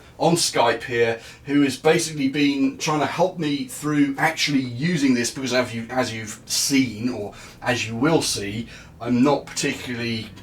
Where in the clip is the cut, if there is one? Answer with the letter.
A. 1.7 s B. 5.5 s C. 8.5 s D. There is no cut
D